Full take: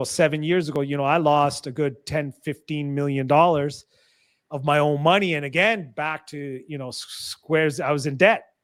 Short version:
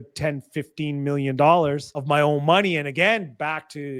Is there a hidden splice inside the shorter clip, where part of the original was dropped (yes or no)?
yes